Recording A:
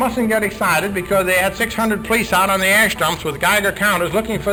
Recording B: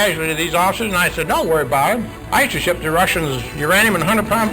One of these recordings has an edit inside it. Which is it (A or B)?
B